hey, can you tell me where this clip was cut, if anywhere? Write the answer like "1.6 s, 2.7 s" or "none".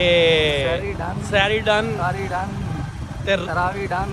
none